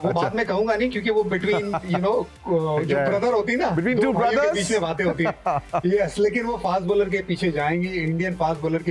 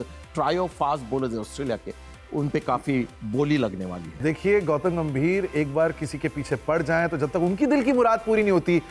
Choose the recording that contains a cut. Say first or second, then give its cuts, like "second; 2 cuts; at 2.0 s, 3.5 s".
second; 1 cut; at 4.1 s